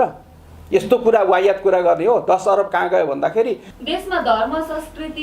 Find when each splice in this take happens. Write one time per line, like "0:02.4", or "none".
0:03.7